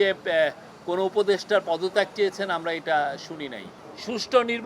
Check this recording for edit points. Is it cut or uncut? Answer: cut